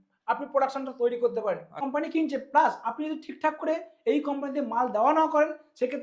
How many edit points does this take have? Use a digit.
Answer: 1